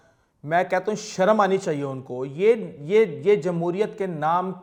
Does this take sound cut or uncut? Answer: uncut